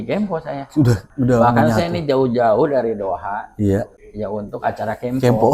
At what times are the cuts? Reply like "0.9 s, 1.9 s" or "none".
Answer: 1.1 s, 4.0 s